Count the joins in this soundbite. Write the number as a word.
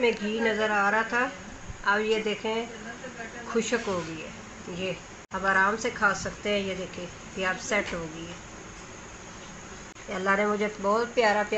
two